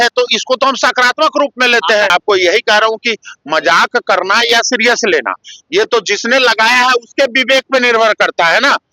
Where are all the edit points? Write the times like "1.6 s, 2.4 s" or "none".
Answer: 2.1 s